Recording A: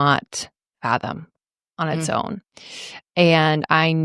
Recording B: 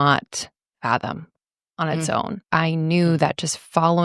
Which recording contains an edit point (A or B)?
B